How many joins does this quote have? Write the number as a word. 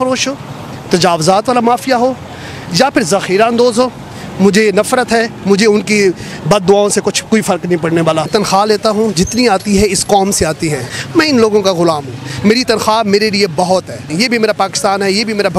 three